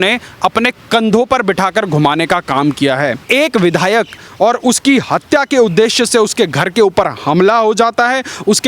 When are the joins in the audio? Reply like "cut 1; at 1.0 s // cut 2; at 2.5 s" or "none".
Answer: cut 1; at 3.2 s